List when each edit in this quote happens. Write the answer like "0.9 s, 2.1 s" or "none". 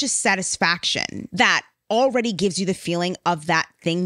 1.2 s